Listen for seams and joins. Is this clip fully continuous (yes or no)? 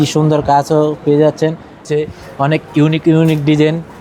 no